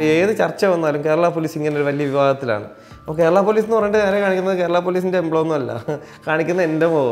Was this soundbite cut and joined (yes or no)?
no